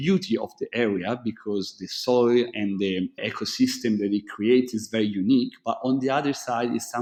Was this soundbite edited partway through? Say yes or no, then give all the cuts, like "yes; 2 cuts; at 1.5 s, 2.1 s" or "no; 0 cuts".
no; 0 cuts